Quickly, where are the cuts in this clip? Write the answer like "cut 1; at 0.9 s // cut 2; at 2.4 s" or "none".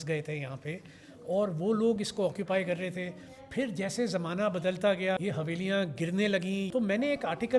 cut 1; at 5.2 s // cut 2; at 6.7 s

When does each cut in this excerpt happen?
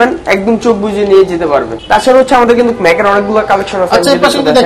cut 1; at 1.7 s

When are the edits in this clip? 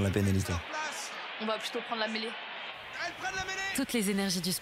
cut 1; at 3.7 s

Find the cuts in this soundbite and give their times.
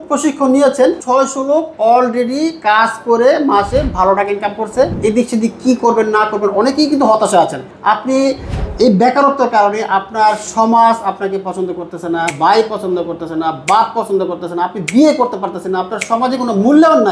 cut 1; at 1.0 s // cut 2; at 4.9 s // cut 3; at 7.7 s // cut 4; at 12.3 s

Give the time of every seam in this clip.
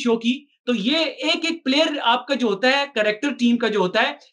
none

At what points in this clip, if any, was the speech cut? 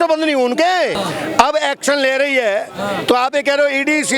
cut 1; at 1.0 s

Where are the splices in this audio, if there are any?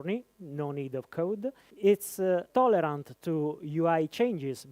cut 1; at 1.7 s // cut 2; at 2.5 s

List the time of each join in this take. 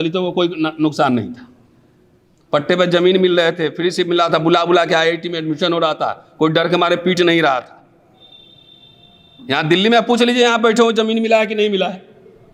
none

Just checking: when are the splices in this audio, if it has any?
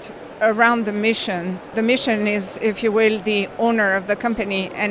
cut 1; at 1.7 s

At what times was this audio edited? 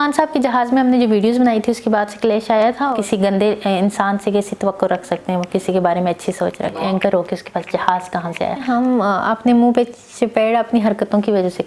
cut 1; at 2.9 s // cut 2; at 6.8 s // cut 3; at 8.6 s

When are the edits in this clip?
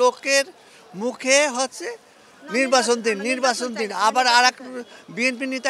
none

